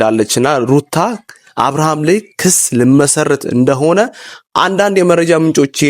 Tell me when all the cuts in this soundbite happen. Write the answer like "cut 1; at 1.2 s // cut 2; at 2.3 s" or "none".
none